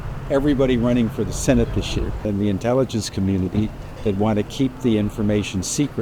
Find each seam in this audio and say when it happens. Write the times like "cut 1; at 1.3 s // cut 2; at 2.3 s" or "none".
cut 1; at 2.2 s

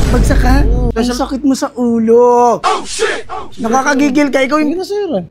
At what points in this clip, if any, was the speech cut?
cut 1; at 0.9 s

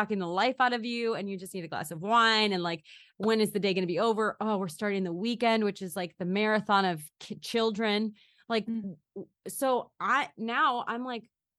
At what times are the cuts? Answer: none

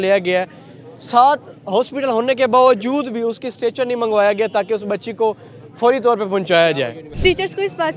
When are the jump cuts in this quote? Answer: cut 1; at 7.0 s

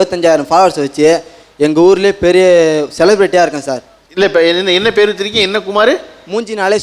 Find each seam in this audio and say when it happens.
none

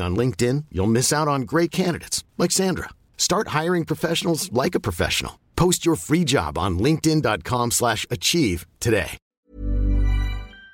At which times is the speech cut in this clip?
cut 1; at 9.3 s

